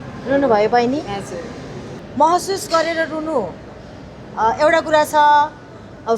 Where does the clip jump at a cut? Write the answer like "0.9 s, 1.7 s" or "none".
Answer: 2.0 s